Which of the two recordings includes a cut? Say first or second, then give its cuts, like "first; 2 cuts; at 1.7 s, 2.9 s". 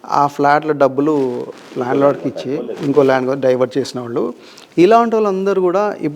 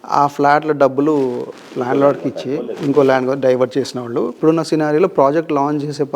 second; 1 cut; at 4.3 s